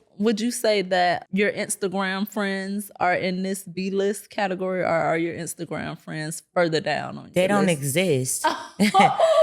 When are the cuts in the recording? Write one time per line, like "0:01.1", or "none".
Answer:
0:01.2